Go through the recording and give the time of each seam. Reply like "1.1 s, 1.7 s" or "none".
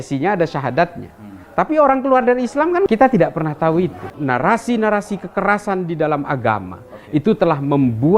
4.0 s